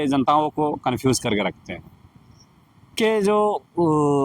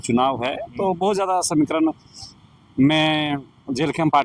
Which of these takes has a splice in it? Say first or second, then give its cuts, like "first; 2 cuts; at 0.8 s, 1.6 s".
first; 1 cut; at 3.0 s